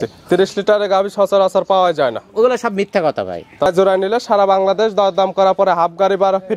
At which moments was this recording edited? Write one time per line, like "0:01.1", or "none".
0:03.7